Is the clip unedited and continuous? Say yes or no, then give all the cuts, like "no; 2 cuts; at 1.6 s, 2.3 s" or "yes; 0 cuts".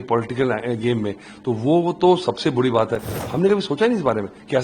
no; 1 cut; at 3.2 s